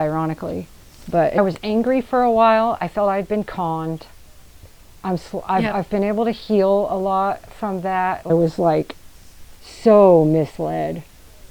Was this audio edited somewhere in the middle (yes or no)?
yes